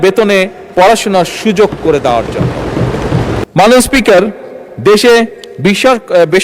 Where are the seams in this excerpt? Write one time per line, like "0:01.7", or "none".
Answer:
0:03.4

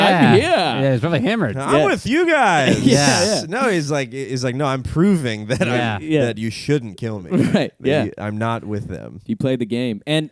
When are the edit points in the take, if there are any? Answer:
none

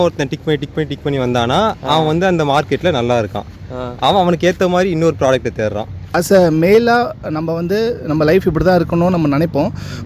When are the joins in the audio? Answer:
0:06.2

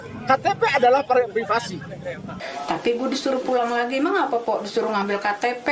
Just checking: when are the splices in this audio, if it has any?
0:02.4

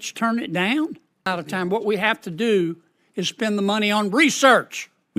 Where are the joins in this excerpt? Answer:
0:01.3

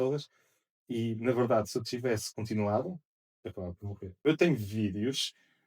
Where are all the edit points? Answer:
0:04.2

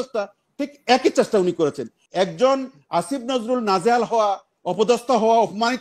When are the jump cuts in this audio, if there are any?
0:02.0

